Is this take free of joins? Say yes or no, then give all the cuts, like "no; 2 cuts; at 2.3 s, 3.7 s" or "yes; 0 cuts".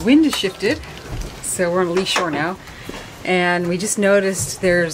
yes; 0 cuts